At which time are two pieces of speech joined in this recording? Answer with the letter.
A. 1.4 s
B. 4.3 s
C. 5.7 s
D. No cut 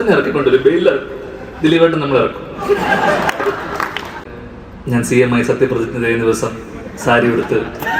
B